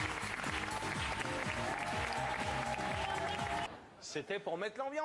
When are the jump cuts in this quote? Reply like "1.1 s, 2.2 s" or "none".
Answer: none

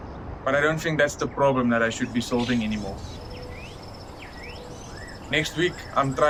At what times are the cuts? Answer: none

